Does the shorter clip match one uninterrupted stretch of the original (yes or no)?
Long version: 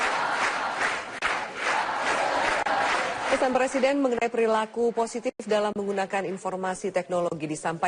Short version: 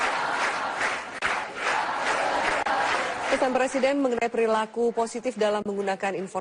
no